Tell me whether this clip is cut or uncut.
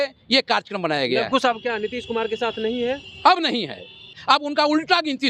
cut